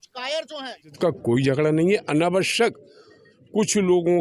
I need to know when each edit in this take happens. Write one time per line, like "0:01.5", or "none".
0:01.0